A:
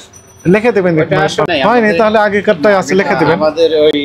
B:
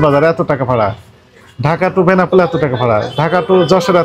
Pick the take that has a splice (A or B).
A